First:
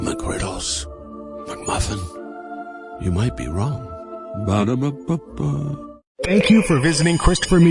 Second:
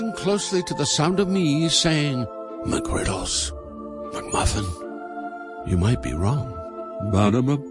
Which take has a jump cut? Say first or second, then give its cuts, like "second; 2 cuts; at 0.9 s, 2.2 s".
first; 1 cut; at 6.0 s